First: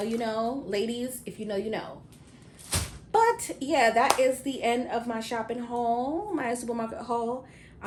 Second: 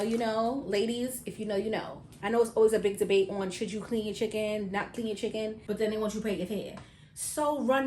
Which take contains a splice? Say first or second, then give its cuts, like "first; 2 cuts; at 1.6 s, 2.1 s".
second; 2 cuts; at 2.1 s, 5.6 s